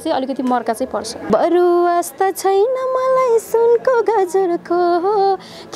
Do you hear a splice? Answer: yes; 1 cut; at 1.3 s

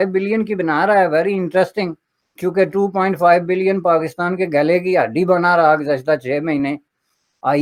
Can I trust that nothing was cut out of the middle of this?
yes; 0 cuts

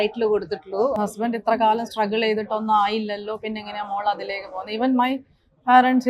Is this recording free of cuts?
no; 1 cut; at 1.0 s

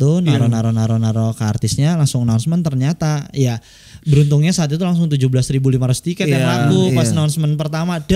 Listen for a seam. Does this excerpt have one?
no; 0 cuts

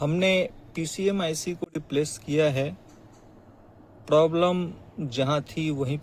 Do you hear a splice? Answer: no; 0 cuts

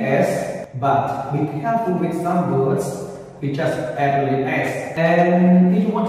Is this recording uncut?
no; 1 cut; at 4.8 s

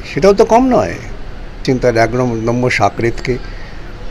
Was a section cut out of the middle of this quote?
yes; 1 cut; at 1.6 s

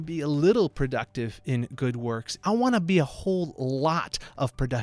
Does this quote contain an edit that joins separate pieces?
yes; 1 cut; at 2.3 s

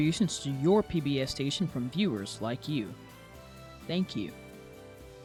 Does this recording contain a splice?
no; 0 cuts

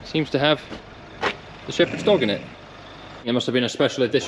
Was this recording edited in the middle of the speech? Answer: yes; 1 cut; at 3.3 s

